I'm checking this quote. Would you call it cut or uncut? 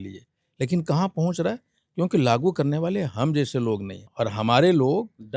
cut